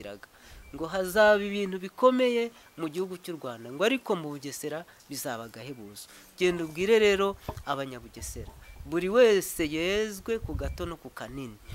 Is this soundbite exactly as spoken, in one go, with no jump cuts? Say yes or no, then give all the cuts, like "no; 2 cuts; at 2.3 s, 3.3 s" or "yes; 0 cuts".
yes; 0 cuts